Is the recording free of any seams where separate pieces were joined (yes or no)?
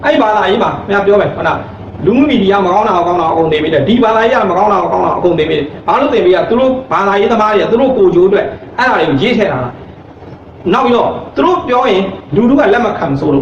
yes